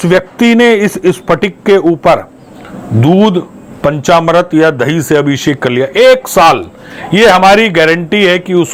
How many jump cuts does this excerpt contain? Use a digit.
0